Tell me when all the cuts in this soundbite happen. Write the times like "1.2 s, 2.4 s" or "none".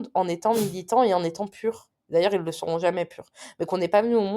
1.9 s